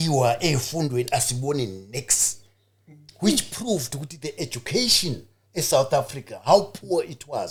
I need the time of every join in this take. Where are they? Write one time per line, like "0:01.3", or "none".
none